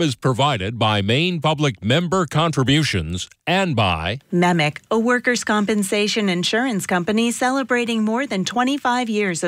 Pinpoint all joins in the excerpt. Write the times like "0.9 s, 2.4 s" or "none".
4.2 s